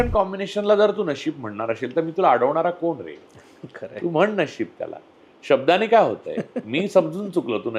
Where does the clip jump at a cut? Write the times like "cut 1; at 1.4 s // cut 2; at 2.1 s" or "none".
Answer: none